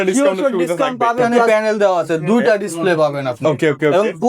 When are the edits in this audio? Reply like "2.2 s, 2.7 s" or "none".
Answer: 1.5 s